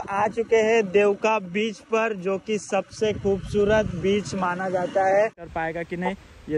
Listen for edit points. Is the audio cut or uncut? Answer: cut